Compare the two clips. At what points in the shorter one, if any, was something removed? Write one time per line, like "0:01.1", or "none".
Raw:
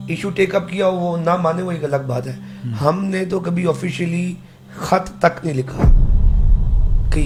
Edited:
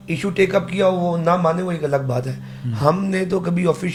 none